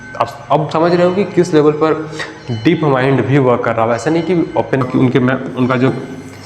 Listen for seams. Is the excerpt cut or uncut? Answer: cut